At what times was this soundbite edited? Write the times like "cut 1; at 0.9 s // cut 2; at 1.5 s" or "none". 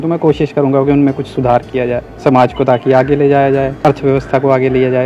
cut 1; at 2.1 s // cut 2; at 3.7 s